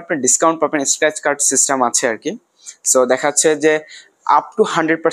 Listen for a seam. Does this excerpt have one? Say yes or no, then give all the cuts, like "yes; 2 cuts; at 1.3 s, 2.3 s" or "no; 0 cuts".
no; 0 cuts